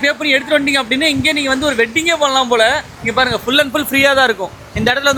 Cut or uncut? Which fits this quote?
uncut